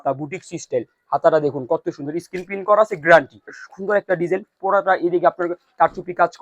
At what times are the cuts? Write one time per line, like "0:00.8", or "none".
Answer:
0:03.6